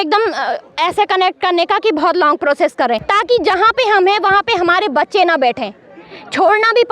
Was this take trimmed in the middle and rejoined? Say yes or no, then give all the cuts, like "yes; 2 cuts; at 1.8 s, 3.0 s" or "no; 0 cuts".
yes; 1 cut; at 3.1 s